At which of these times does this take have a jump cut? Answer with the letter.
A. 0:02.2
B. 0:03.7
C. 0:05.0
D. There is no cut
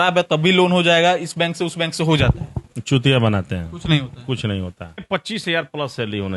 C